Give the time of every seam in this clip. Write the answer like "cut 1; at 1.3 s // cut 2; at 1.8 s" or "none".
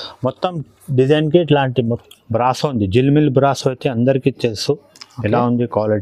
cut 1; at 1.9 s